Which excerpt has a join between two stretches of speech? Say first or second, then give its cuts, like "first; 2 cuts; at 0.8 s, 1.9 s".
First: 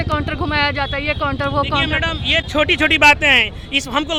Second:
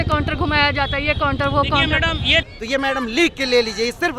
second; 1 cut; at 2.4 s